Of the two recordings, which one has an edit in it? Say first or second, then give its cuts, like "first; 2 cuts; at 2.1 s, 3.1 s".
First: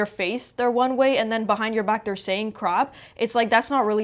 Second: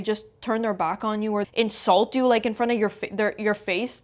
second; 1 cut; at 1.5 s